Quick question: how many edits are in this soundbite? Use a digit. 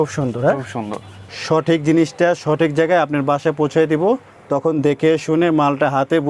1